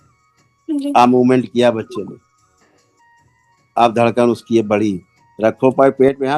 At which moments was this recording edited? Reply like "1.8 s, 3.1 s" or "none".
2.2 s, 3.7 s